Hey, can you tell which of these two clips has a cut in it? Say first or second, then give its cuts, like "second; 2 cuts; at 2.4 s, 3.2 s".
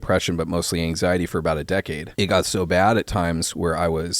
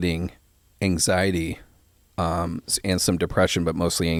first; 1 cut; at 2.0 s